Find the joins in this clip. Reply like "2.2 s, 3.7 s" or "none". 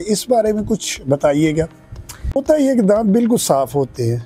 2.4 s